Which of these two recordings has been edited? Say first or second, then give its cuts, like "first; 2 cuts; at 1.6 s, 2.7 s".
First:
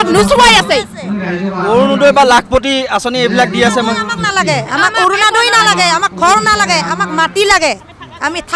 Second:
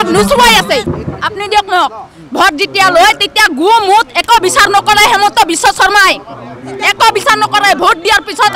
second; 1 cut; at 0.9 s